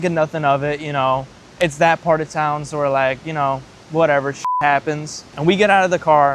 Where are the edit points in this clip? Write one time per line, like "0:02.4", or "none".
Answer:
none